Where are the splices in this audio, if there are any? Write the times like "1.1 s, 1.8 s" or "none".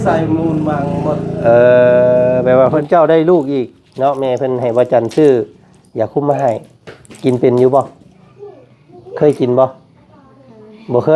2.8 s